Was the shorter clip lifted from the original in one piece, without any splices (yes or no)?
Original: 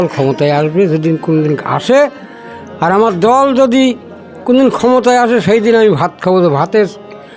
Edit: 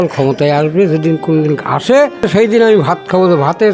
no